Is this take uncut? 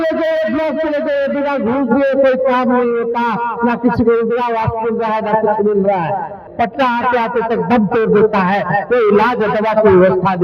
no; 1 cut; at 6.4 s

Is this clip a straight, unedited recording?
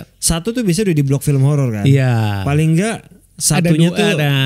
yes; 0 cuts

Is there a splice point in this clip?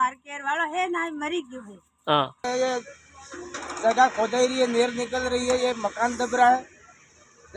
yes; 1 cut; at 2.4 s

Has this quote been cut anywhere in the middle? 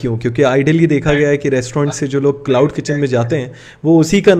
no; 0 cuts

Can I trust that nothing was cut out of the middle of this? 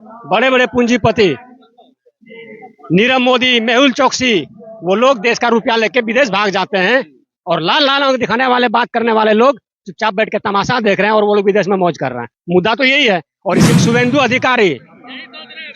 no; 1 cut; at 13.7 s

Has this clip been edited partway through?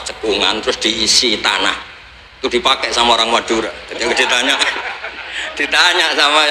no; 0 cuts

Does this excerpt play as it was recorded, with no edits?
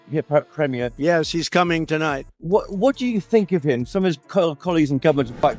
yes; 0 cuts

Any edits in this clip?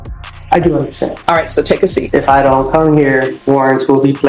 yes; 2 cuts; at 2.1 s, 3.3 s

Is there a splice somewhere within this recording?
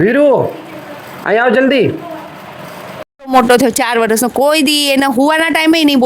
yes; 1 cut; at 3.2 s

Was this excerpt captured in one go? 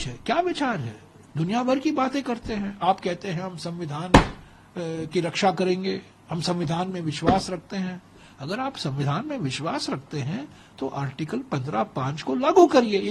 yes; 0 cuts

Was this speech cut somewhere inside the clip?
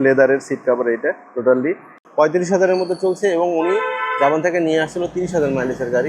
yes; 1 cut; at 1.9 s

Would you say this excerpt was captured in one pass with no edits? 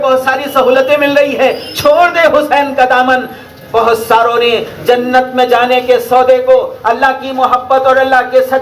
yes; 0 cuts

